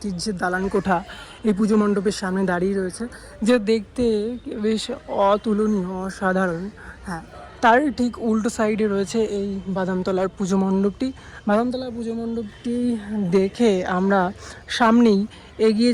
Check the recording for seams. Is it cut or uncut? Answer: uncut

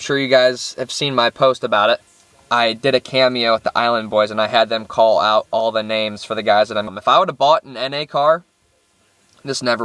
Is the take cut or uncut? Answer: cut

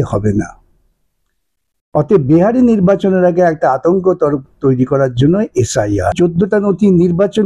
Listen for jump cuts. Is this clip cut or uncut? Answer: cut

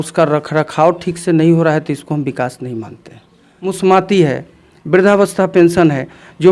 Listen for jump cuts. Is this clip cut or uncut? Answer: cut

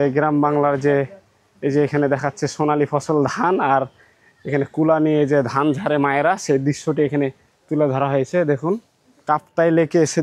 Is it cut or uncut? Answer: cut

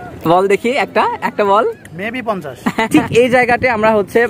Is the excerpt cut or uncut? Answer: cut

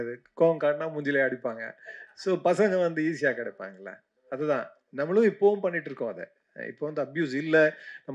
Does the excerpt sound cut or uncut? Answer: uncut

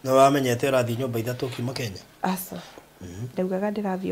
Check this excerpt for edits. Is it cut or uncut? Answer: uncut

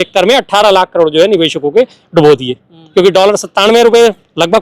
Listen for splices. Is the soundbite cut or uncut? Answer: cut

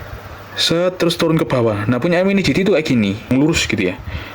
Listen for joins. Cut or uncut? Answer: cut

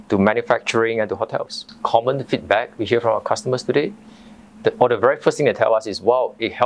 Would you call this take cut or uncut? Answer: cut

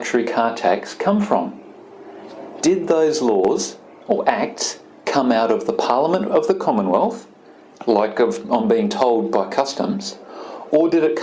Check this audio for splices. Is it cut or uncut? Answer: uncut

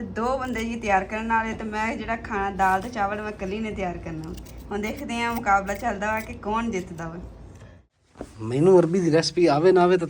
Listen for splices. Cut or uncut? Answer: cut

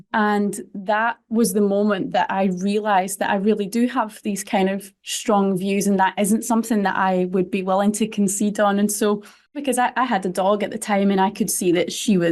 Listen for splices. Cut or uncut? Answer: cut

